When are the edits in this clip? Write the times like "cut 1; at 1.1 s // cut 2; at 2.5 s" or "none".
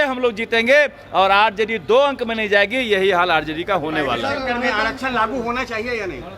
none